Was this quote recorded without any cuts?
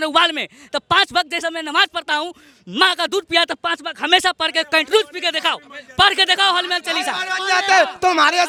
yes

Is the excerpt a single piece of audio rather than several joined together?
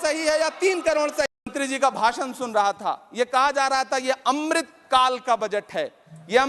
no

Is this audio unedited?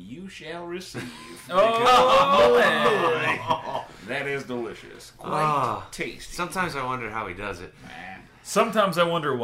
yes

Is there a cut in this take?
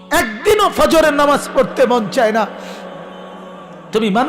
no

